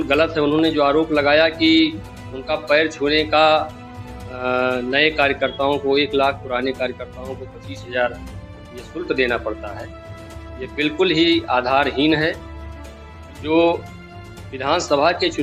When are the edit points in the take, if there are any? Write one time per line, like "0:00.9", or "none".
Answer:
none